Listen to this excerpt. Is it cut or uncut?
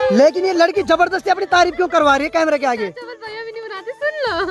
uncut